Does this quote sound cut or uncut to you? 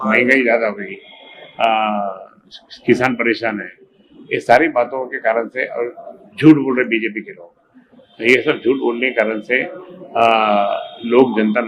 uncut